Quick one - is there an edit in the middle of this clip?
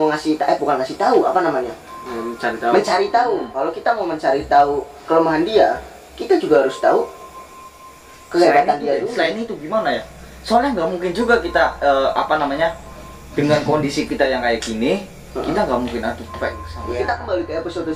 yes; 1 cut; at 16.7 s

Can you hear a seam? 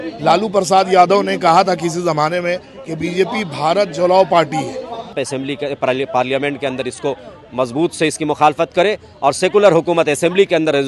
yes; 1 cut; at 5.2 s

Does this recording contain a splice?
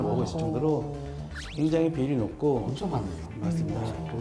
no; 0 cuts

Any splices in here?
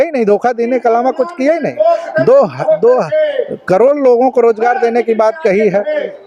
no; 0 cuts

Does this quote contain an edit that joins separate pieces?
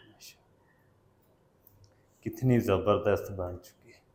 no; 0 cuts

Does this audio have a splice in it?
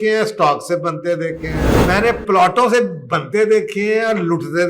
yes; 1 cut; at 1.7 s

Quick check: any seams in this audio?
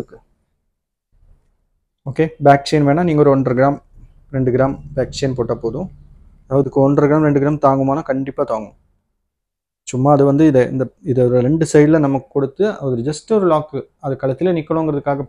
no; 0 cuts

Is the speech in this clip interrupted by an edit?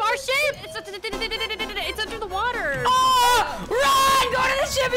no; 0 cuts

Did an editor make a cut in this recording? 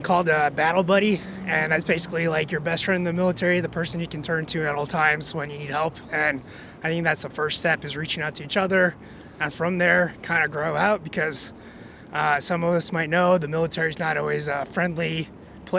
no; 0 cuts

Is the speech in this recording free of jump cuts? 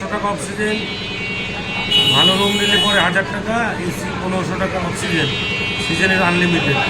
yes; 0 cuts

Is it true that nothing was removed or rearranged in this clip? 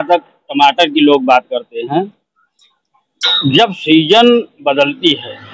yes; 0 cuts

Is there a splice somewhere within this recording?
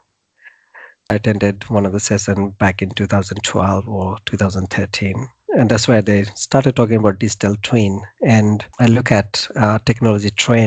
yes; 2 cuts; at 1.1 s, 8.7 s

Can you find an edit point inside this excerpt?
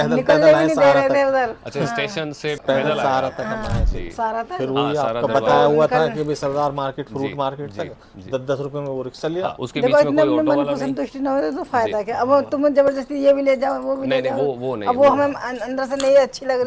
yes; 2 cuts; at 2.6 s, 9.6 s

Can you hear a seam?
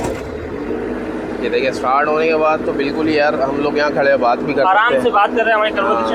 no; 0 cuts

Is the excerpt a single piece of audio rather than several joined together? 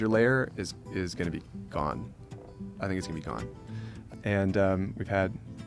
no; 1 cut; at 4.0 s

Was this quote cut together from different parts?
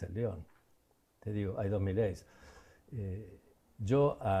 no; 0 cuts

